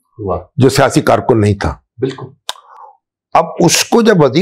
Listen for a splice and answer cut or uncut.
uncut